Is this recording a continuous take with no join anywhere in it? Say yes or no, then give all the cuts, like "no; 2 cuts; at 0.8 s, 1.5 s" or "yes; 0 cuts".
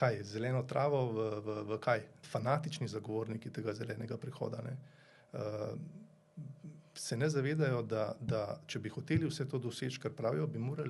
no; 1 cut; at 2.2 s